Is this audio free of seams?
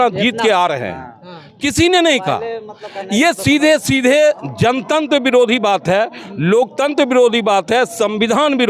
yes; 0 cuts

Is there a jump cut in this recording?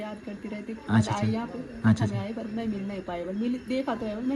no; 0 cuts

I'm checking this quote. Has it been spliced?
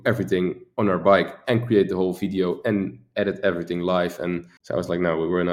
yes; 1 cut; at 4.5 s

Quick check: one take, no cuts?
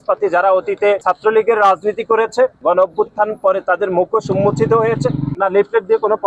no; 3 cuts; at 1.0 s, 2.6 s, 5.3 s

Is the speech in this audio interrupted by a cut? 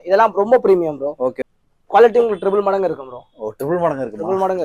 yes; 1 cut; at 1.3 s

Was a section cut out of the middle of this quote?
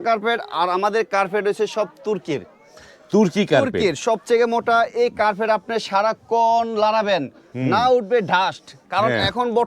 no; 0 cuts

